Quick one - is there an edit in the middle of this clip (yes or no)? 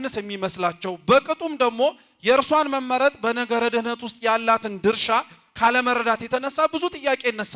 no